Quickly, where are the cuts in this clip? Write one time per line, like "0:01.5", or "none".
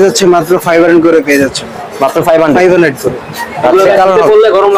none